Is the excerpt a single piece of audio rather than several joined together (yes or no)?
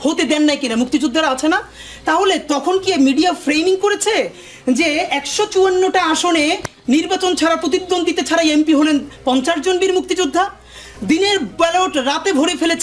yes